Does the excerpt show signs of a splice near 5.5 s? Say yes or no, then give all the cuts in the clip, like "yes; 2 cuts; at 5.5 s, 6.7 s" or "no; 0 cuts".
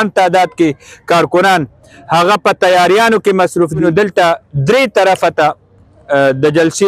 no; 1 cut; at 3.8 s